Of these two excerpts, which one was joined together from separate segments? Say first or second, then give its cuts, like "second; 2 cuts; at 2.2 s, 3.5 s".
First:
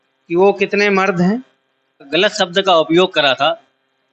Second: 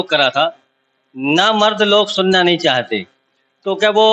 first; 1 cut; at 2.1 s